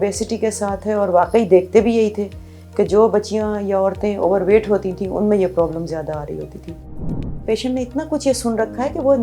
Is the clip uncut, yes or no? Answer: no